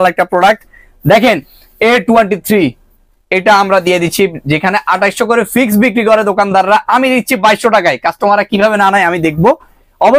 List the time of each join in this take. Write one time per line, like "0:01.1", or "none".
none